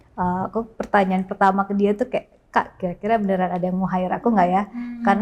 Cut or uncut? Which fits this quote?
uncut